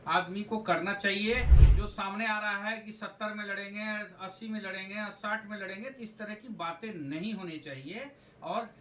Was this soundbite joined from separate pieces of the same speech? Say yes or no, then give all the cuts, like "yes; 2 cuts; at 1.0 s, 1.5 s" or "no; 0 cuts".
yes; 1 cut; at 1.6 s